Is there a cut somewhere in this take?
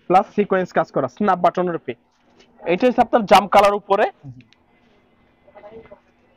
no; 0 cuts

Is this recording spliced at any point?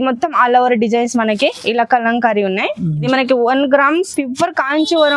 yes; 1 cut; at 3.0 s

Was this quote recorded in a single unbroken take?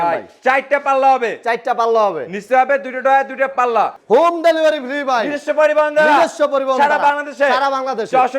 no; 1 cut; at 4.0 s

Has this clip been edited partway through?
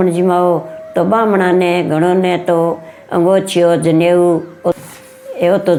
no; 0 cuts

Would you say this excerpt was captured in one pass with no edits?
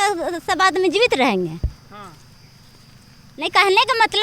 yes; 0 cuts

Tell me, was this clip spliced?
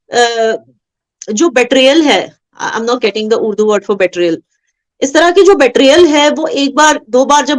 no; 0 cuts

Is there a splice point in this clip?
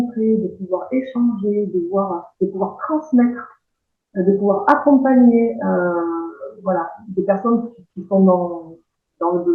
no; 0 cuts

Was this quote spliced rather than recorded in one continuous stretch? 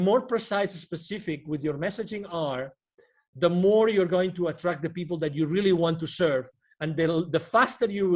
no; 0 cuts

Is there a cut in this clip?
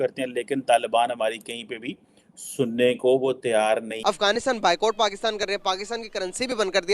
yes; 1 cut; at 3.9 s

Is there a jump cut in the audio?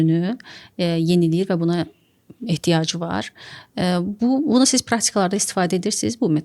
no; 0 cuts

